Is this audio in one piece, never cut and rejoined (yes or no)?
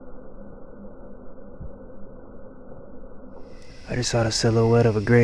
no